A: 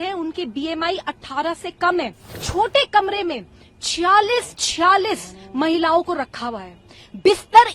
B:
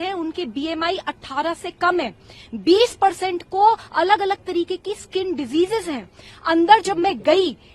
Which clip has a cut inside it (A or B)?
A